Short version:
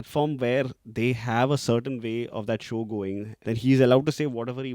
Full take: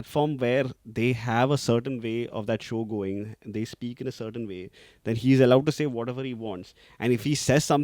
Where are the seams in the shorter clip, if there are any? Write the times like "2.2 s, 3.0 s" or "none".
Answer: 3.3 s